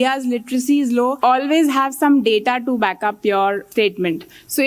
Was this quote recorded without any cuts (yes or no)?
no